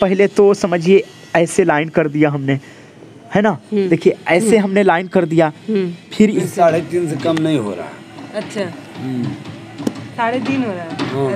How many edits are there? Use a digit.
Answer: 1